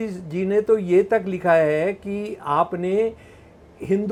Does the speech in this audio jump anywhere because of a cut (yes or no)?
no